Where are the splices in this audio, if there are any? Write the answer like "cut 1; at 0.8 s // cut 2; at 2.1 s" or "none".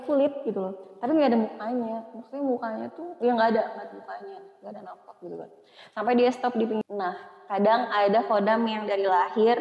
cut 1; at 6.8 s